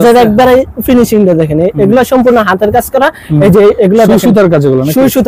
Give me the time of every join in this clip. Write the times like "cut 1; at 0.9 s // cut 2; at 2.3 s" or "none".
none